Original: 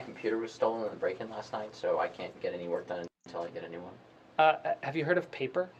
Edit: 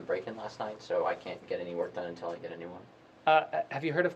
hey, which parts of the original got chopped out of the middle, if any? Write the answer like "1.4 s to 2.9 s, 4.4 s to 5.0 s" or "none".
3.1 s to 3.3 s